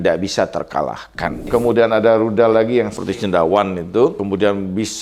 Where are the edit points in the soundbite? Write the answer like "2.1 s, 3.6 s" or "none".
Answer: 1.5 s, 3.0 s, 4.2 s